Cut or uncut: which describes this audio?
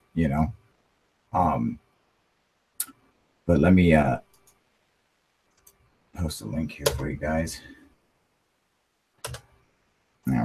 uncut